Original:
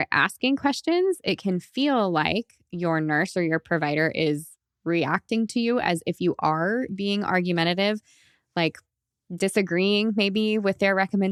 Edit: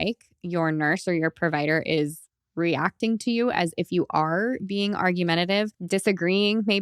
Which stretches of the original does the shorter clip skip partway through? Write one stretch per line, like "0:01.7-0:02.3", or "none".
0:08.1-0:09.3